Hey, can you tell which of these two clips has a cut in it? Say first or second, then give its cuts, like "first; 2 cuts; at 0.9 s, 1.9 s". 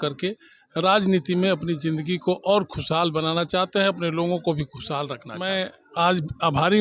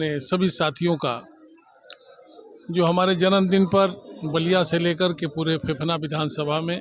first; 1 cut; at 5.4 s